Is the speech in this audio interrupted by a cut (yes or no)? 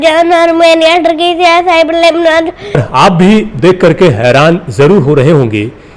yes